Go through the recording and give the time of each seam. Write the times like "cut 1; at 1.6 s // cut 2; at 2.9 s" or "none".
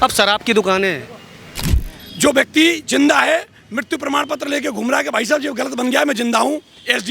cut 1; at 1.7 s